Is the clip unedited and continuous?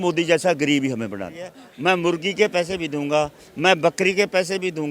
no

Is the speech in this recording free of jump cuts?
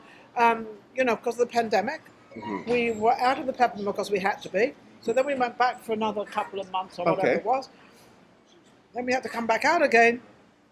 yes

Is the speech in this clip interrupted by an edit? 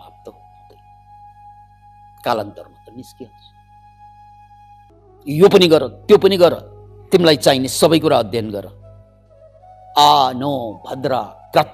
yes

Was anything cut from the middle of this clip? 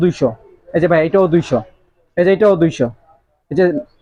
no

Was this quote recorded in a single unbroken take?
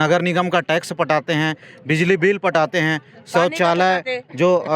yes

